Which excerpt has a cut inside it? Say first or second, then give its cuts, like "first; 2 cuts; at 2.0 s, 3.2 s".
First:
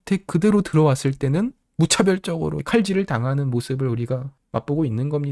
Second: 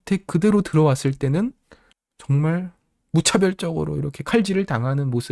first; 3 cuts; at 1.6 s, 2.6 s, 4.4 s